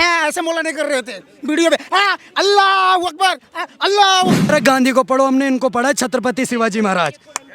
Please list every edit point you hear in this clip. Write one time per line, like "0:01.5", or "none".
0:04.5